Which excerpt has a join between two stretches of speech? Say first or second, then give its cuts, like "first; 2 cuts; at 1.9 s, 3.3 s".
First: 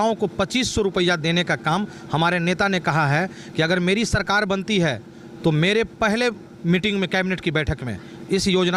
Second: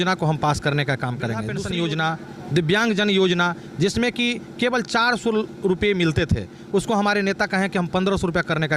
second; 1 cut; at 1.5 s